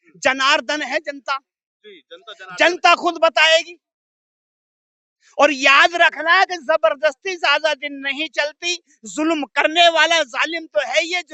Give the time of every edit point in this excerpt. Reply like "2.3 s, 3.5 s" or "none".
none